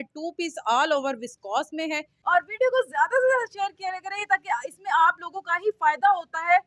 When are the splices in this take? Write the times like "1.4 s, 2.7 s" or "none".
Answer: 2.1 s